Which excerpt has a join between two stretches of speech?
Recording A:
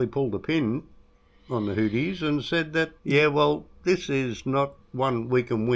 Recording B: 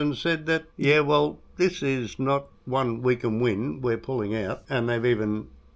B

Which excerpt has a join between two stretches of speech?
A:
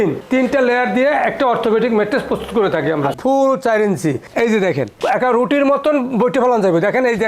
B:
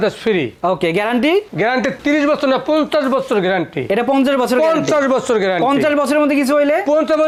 A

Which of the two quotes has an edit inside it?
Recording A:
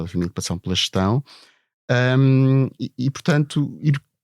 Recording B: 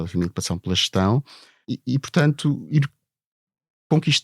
B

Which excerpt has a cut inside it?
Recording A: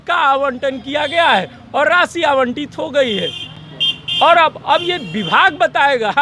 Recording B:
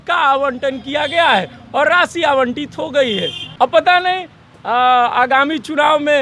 B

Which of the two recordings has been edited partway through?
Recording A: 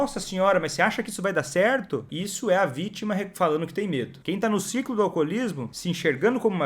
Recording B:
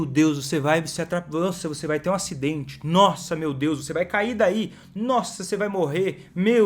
A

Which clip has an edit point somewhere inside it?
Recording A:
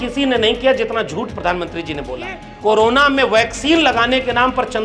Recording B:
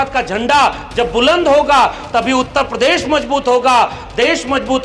A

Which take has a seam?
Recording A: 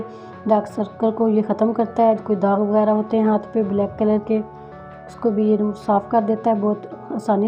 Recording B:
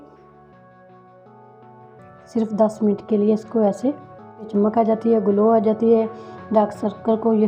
B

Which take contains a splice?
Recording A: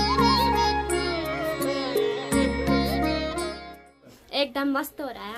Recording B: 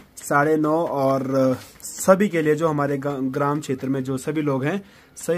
A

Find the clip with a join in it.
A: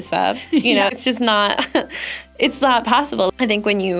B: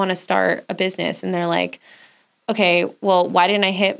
A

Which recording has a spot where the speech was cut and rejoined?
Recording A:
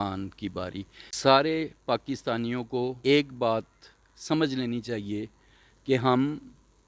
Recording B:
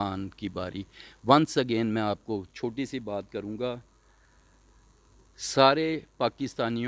A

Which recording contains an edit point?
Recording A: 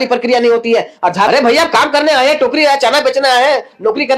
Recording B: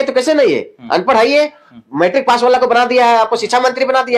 A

